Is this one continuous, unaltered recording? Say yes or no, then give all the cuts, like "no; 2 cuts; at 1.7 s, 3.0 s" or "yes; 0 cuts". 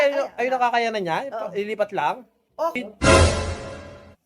no; 1 cut; at 2.8 s